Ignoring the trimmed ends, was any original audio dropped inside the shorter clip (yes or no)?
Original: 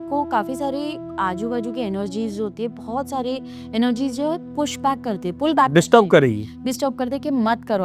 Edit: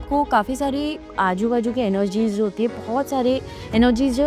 no